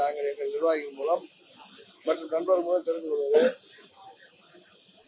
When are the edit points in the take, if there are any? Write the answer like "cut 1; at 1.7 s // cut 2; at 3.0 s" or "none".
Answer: none

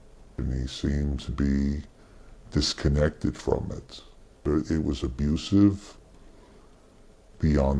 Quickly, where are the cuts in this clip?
none

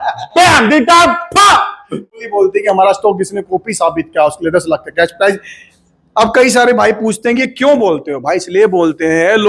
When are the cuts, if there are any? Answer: cut 1; at 2.1 s

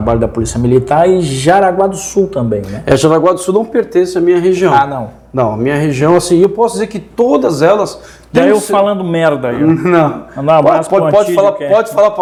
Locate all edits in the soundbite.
none

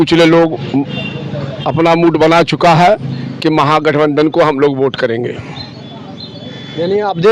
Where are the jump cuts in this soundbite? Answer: none

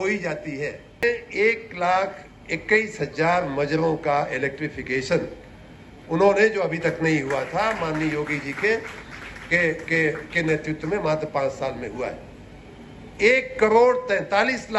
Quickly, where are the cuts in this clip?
cut 1; at 1.0 s

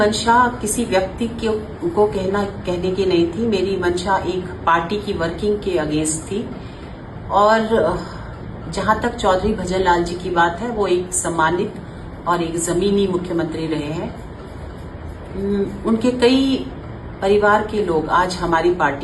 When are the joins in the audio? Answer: none

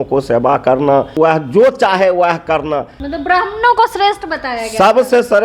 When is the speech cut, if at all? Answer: cut 1; at 1.1 s // cut 2; at 3.0 s

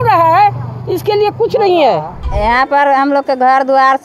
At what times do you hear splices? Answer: cut 1; at 2.3 s

